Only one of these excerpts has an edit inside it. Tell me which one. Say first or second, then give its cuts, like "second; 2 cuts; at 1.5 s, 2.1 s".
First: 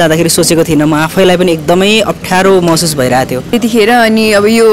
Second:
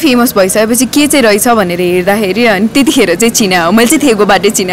first; 1 cut; at 3.5 s